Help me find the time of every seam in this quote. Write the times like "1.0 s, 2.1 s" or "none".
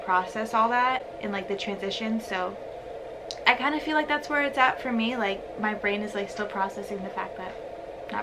none